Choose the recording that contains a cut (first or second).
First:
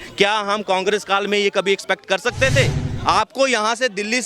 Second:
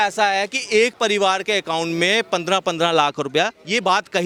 first